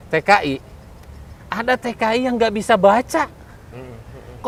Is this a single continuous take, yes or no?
yes